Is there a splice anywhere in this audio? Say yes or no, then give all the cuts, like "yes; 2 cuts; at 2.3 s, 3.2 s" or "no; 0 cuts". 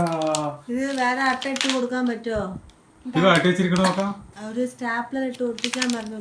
yes; 1 cut; at 4.3 s